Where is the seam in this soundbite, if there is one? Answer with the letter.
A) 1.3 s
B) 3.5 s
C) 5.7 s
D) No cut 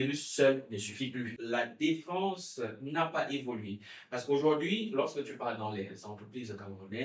A